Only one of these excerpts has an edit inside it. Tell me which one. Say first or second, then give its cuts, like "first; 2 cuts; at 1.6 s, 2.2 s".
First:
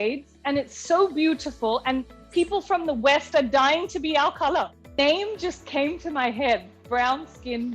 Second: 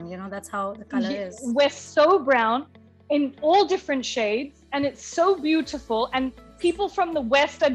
first; 1 cut; at 5.0 s